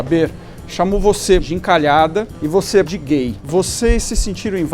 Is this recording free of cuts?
no; 2 cuts; at 1.4 s, 2.8 s

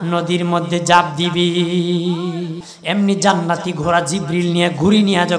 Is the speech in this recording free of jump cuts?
no; 1 cut; at 2.7 s

